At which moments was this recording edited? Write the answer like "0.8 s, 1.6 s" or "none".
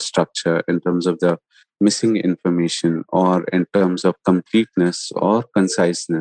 none